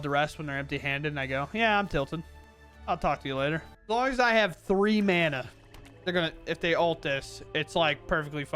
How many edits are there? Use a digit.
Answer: 1